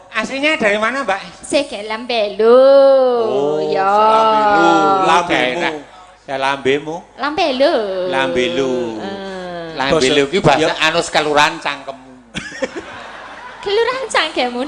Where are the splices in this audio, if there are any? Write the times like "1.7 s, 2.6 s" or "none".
none